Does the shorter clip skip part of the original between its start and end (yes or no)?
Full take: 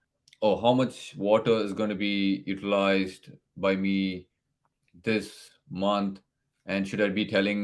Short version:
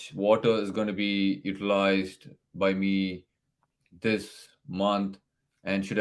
no